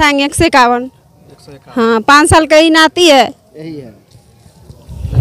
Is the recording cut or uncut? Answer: uncut